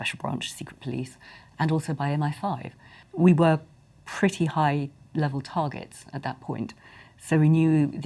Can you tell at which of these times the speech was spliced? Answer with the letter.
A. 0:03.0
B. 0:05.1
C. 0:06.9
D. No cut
A